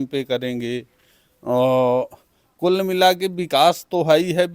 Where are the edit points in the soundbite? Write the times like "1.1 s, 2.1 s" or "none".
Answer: none